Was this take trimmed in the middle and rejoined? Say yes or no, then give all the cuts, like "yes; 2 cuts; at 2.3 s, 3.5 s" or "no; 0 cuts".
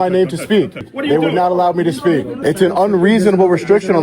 yes; 2 cuts; at 0.9 s, 2.3 s